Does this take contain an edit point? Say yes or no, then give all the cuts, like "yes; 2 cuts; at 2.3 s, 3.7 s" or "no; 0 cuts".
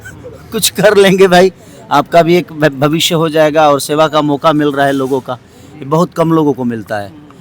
no; 0 cuts